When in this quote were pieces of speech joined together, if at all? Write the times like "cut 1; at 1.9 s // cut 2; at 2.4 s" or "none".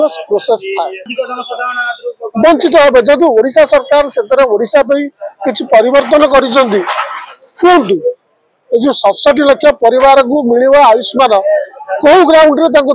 cut 1; at 1.0 s